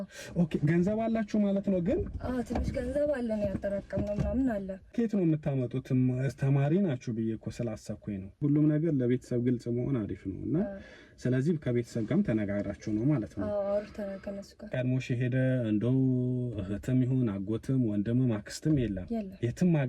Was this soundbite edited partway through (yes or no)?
yes